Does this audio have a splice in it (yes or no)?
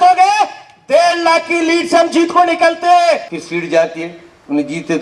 yes